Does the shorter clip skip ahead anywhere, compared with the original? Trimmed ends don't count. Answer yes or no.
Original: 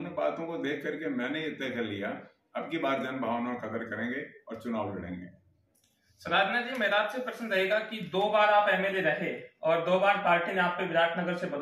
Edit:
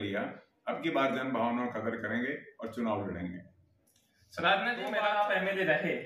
yes